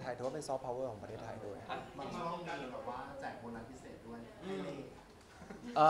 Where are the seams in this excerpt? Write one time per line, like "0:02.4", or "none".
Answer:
none